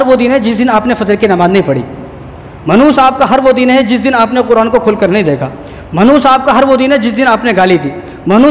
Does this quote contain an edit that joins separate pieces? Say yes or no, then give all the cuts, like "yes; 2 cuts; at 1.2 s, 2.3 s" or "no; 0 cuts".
no; 0 cuts